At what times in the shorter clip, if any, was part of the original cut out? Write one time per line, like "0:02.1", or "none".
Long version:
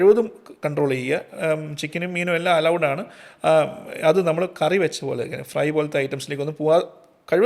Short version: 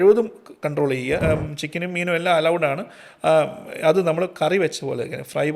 0:01.2